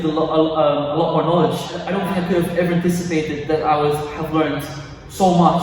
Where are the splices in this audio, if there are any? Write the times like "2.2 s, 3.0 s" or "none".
1.9 s